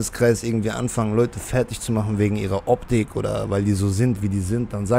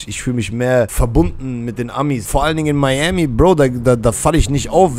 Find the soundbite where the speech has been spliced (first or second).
second